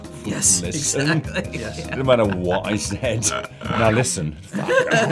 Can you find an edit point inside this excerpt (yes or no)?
no